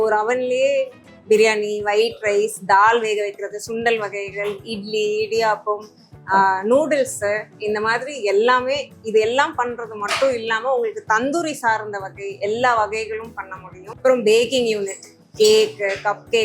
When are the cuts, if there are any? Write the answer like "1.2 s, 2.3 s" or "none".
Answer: 14.0 s